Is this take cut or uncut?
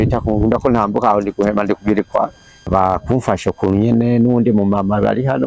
cut